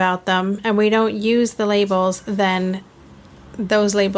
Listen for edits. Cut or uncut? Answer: uncut